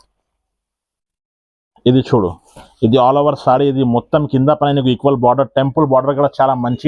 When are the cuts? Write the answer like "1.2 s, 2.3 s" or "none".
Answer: none

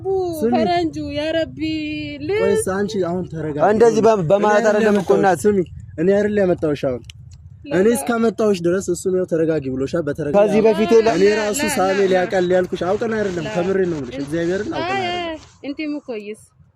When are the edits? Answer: 10.3 s

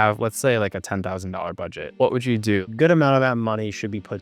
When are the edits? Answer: 2.7 s

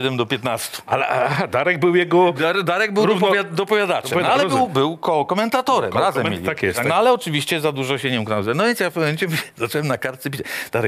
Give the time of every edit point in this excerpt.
none

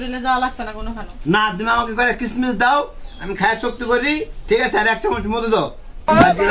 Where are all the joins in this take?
none

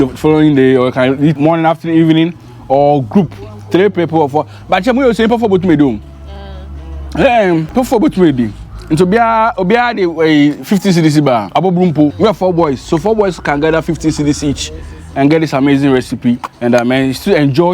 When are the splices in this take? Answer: 1.4 s, 7.7 s, 11.5 s, 12.1 s, 16.5 s

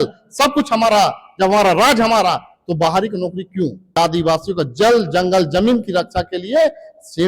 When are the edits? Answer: 4.0 s

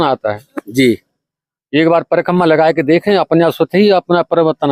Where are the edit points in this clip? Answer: none

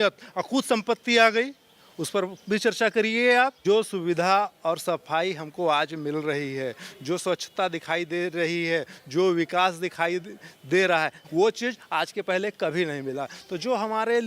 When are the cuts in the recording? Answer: 3.6 s, 11.2 s

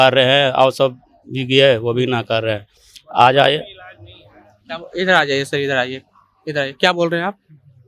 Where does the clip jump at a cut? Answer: none

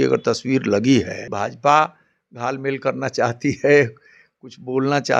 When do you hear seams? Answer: 1.3 s

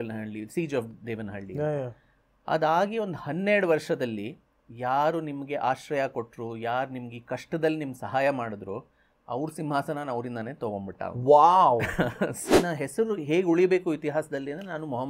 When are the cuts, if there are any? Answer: 12.5 s

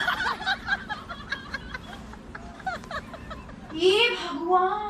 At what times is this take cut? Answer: 2.6 s

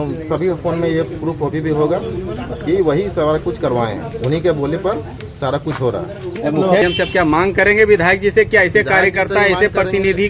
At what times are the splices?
6.8 s

